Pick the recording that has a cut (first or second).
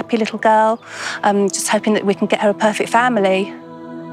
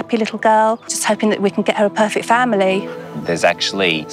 second